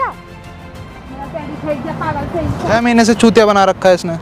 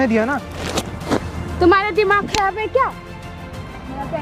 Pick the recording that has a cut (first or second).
first